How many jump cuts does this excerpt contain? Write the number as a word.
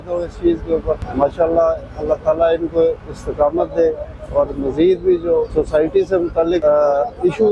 three